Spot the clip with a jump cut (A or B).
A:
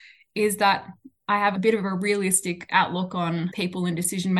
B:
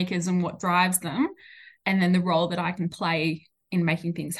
A